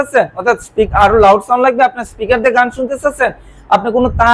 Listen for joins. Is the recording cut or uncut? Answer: uncut